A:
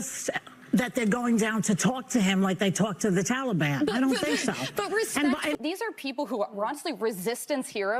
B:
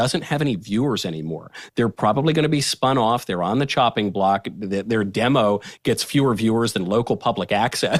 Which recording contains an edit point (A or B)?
A